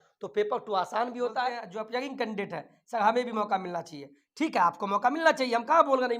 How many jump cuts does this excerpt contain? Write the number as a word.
one